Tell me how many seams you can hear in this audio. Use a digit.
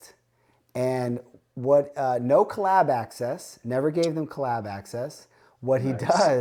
0